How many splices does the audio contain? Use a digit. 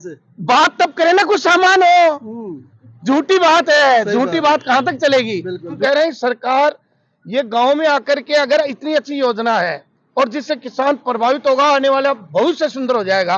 1